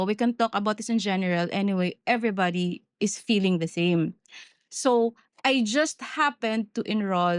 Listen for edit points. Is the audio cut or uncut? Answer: uncut